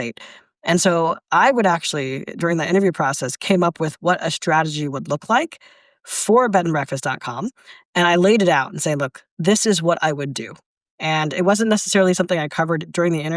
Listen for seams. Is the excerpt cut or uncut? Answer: uncut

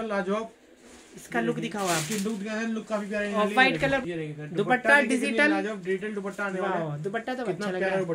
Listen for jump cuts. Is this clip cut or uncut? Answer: cut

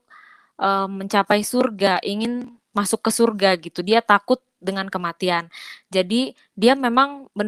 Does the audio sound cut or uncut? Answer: uncut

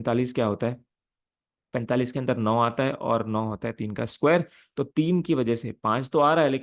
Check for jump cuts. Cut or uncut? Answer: uncut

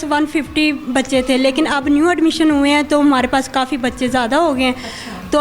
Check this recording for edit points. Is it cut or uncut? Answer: uncut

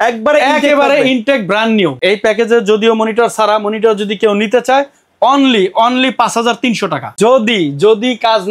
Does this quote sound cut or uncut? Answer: cut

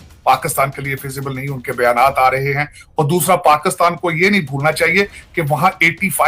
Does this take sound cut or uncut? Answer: uncut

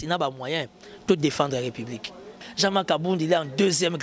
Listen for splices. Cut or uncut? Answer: cut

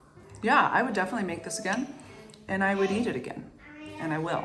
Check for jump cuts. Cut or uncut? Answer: uncut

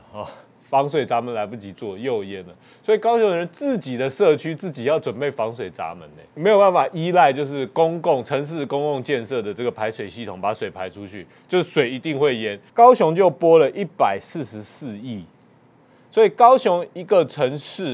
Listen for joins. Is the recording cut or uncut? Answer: cut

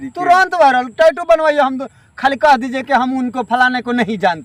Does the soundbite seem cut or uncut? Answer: uncut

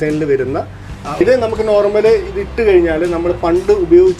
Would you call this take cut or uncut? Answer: cut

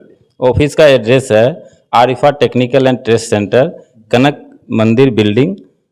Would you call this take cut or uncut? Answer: uncut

